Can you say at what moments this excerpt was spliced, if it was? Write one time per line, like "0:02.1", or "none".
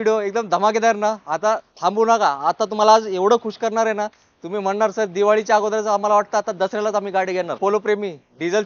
0:07.5